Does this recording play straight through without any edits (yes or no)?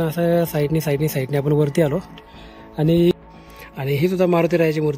no